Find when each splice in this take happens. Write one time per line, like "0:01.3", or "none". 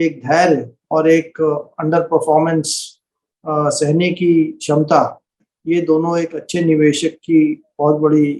none